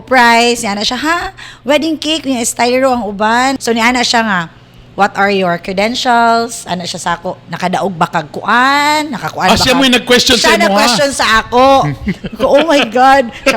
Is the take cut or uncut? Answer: cut